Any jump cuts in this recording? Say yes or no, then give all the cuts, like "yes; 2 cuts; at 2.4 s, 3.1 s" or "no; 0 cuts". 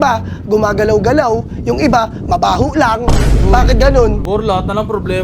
yes; 1 cut; at 4.2 s